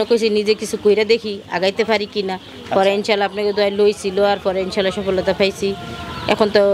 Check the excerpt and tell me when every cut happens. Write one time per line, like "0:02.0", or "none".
none